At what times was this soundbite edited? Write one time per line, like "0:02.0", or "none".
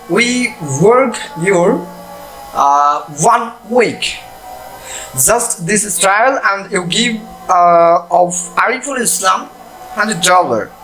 none